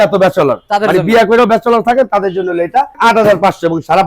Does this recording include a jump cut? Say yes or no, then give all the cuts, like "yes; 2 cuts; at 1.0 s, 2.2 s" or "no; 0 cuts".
yes; 1 cut; at 2.9 s